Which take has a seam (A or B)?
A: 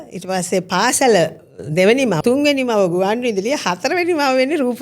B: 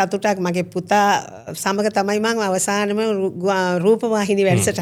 A